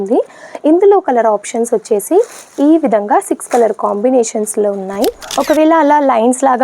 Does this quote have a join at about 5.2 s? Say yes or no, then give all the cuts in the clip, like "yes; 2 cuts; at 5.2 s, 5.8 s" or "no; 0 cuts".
yes; 1 cut; at 5.2 s